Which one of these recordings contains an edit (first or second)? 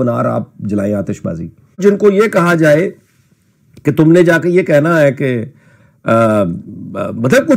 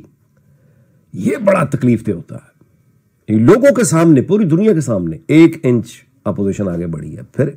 first